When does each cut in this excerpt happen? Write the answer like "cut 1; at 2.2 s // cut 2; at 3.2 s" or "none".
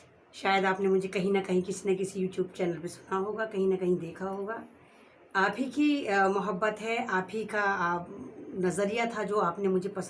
none